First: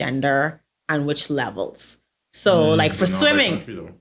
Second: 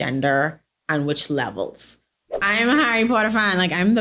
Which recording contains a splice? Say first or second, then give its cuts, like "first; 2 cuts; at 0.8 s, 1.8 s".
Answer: second; 1 cut; at 2.2 s